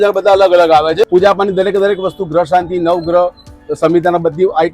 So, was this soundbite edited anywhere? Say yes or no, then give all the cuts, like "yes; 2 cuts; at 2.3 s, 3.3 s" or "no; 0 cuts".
yes; 1 cut; at 1.0 s